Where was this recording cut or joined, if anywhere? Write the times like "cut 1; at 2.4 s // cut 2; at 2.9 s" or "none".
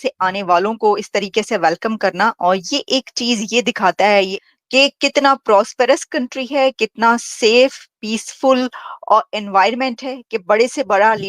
cut 1; at 4.4 s